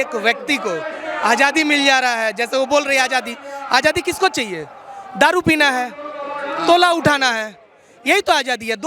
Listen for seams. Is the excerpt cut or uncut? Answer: uncut